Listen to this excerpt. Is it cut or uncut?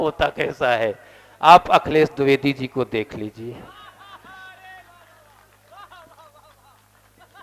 uncut